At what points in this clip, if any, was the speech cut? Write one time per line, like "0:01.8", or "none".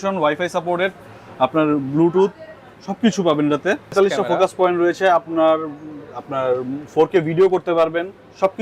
0:03.9